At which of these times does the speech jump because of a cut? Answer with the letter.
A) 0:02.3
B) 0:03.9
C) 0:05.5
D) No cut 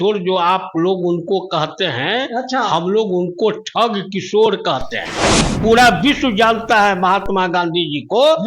C